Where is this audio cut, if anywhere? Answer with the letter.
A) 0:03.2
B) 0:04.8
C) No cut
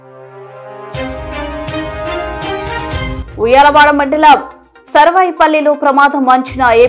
A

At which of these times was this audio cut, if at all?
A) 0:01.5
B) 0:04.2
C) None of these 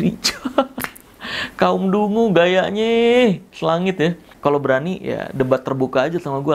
B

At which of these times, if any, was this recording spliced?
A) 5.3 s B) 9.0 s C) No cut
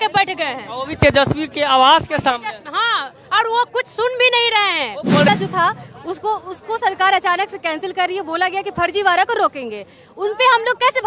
A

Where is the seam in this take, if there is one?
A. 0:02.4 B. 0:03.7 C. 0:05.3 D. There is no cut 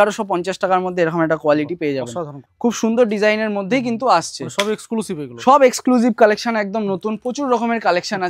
A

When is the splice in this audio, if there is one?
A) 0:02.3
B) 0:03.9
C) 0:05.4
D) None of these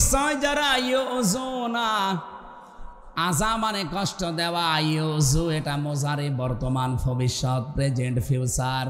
D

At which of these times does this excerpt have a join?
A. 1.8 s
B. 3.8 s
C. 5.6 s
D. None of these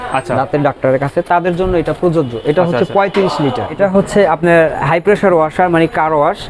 B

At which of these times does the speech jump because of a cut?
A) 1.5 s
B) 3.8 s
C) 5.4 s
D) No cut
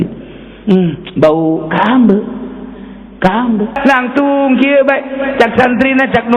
B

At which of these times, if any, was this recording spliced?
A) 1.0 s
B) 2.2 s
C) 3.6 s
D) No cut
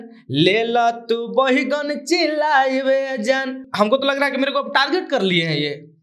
C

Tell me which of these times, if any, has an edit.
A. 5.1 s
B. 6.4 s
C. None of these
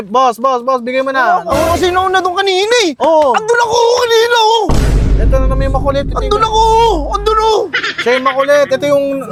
C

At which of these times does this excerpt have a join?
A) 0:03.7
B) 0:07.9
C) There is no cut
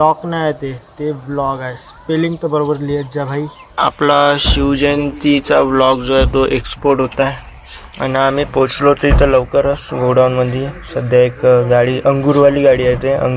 A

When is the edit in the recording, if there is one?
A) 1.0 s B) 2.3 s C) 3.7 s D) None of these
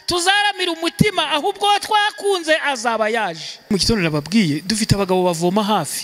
C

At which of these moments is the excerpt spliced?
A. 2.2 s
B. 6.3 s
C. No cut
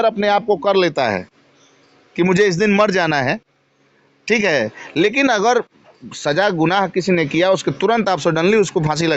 C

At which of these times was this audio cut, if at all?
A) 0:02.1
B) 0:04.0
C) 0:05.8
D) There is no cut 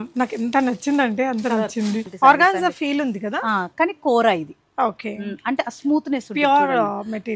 A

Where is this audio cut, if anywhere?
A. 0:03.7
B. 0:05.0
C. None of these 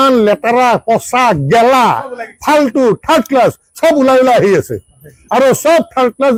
C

